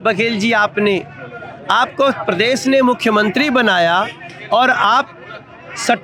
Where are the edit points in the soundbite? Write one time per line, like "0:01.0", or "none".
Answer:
none